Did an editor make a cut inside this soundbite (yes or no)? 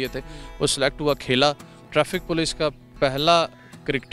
yes